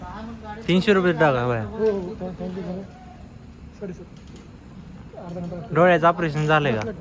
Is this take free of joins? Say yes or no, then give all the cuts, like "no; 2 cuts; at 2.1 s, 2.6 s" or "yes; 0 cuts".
yes; 0 cuts